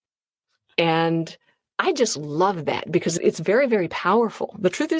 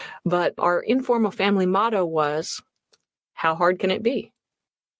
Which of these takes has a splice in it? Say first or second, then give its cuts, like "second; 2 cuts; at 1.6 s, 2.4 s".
first; 1 cut; at 3.1 s